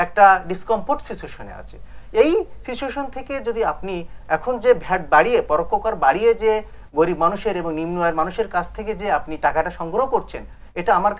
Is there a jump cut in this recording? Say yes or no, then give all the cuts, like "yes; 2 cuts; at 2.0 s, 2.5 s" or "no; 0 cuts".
no; 0 cuts